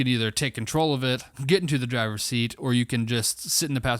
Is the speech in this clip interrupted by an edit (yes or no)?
yes